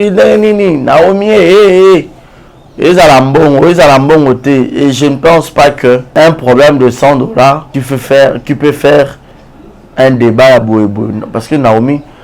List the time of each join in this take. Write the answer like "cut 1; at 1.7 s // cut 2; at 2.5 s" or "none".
cut 1; at 6.1 s // cut 2; at 7.7 s